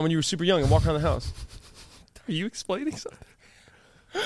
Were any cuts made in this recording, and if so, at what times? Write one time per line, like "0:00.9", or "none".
none